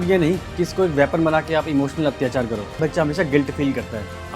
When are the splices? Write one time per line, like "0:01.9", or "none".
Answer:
0:02.8